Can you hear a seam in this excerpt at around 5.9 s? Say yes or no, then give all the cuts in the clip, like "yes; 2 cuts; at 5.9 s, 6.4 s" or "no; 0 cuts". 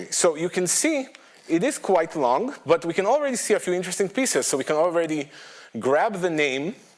no; 0 cuts